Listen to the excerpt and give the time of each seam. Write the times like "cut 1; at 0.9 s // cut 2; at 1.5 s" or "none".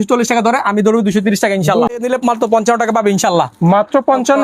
cut 1; at 1.9 s